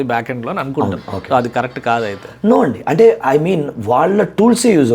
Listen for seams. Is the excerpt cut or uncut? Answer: uncut